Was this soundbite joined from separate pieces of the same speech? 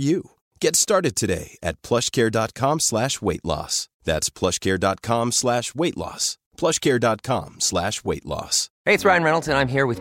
yes; 1 cut; at 8.6 s

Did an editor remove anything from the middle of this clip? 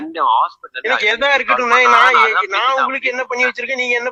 no; 0 cuts

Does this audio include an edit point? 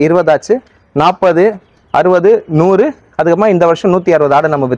no; 0 cuts

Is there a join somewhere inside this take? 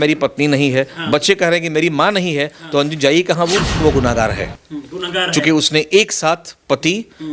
yes; 1 cut; at 3.8 s

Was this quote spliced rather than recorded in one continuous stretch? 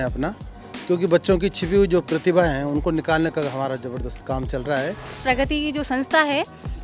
yes; 1 cut; at 5.1 s

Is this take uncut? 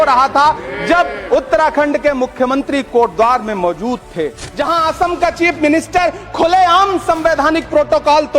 no; 1 cut; at 4.5 s

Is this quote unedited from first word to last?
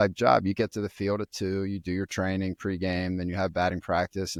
yes; 0 cuts

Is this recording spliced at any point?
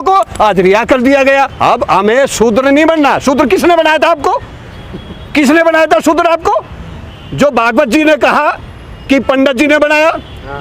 yes; 1 cut; at 1.5 s

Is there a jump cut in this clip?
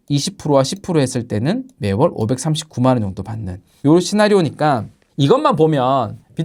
no; 0 cuts

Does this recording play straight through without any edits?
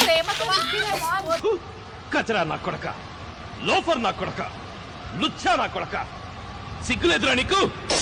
yes; 0 cuts

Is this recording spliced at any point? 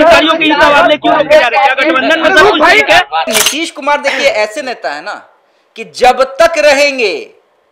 yes; 1 cut; at 3.3 s

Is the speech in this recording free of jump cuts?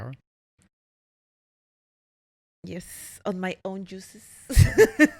yes; 0 cuts

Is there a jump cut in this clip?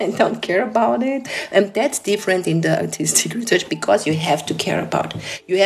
yes; 1 cut; at 1.3 s

